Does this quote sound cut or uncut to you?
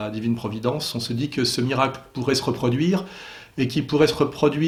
uncut